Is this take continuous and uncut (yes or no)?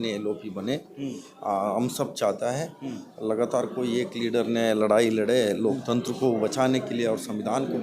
yes